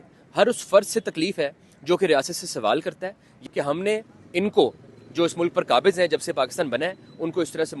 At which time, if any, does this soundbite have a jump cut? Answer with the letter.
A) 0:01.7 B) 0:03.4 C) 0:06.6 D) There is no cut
B